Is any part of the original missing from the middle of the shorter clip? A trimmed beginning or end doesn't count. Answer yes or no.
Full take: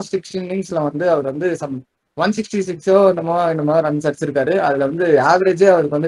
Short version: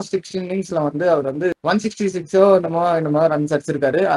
yes